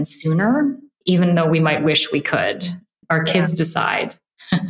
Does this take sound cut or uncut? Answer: cut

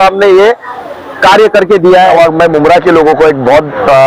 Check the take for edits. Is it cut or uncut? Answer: cut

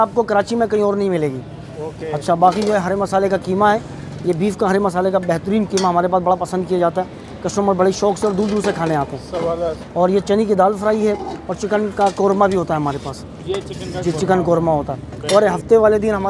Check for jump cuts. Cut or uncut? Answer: uncut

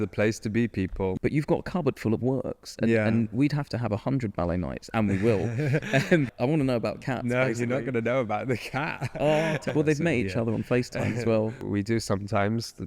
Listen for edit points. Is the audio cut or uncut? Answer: cut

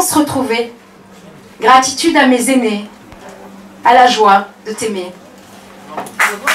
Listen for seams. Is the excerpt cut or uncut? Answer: uncut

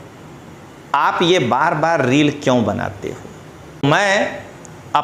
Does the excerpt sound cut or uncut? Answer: cut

